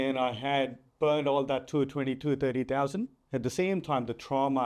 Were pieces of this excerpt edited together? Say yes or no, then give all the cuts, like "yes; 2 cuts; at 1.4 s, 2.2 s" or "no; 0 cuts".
no; 0 cuts